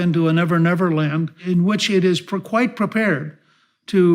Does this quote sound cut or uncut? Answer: cut